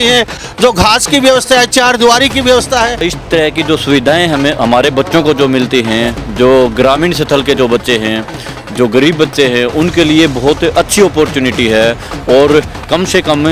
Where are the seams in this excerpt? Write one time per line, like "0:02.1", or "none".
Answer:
0:03.0